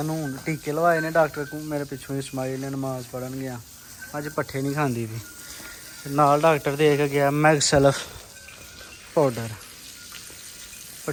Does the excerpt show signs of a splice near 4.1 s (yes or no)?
no